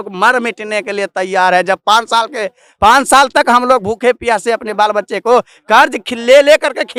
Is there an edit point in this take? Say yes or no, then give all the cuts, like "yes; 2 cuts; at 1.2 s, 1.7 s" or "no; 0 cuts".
no; 0 cuts